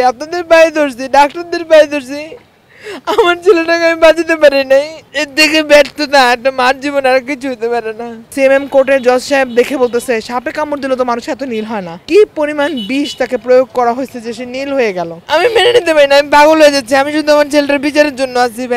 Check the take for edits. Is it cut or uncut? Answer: cut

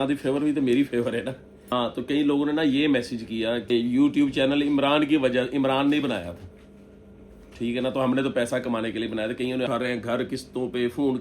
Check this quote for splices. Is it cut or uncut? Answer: cut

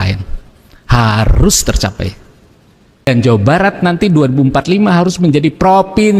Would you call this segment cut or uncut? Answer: cut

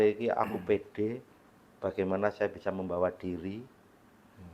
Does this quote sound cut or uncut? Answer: uncut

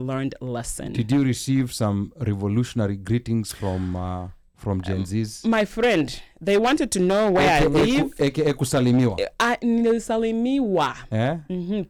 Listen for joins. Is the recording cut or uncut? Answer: uncut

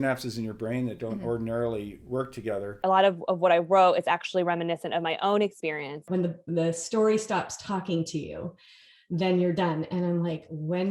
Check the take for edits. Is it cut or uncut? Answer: cut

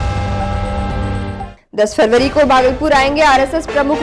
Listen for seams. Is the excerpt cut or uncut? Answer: cut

